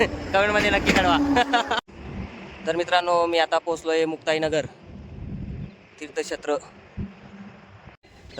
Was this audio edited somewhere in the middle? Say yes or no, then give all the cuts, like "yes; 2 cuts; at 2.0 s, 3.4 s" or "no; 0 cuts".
no; 0 cuts